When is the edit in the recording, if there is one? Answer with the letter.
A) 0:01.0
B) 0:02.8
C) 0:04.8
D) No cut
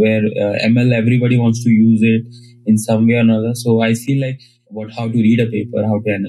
C